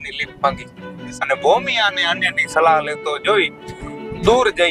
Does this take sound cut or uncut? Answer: cut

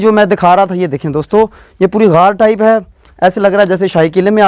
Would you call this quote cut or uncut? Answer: uncut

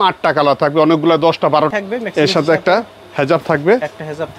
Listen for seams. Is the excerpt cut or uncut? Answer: cut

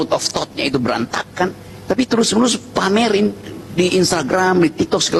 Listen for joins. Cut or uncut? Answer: uncut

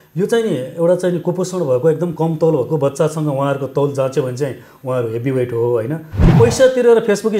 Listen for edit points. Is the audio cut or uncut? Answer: cut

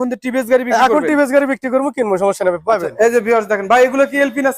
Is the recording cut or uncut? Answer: cut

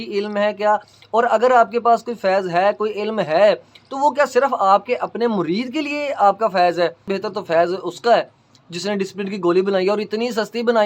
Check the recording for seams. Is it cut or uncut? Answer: cut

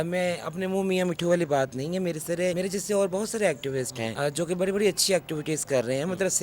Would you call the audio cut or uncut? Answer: cut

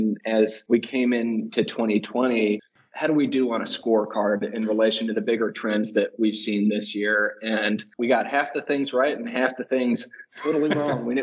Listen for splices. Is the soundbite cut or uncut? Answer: uncut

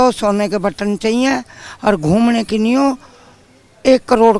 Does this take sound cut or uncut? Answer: uncut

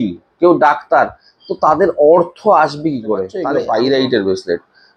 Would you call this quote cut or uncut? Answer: cut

